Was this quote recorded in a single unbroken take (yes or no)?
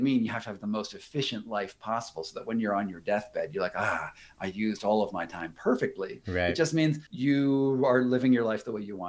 no